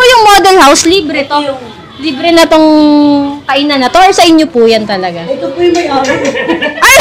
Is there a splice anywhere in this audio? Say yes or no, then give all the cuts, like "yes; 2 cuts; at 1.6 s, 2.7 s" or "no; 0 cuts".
no; 0 cuts